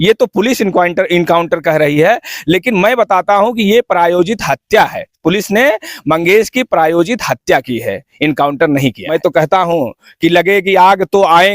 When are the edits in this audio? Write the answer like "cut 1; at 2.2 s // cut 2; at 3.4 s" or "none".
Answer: cut 1; at 9.0 s